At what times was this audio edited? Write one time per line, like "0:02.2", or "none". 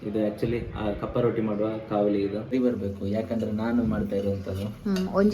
0:02.4